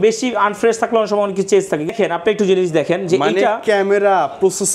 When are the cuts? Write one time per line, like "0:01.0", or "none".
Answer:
0:01.9